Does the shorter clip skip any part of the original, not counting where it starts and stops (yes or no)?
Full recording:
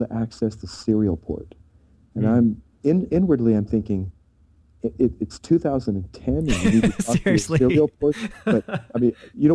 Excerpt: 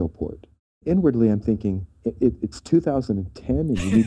yes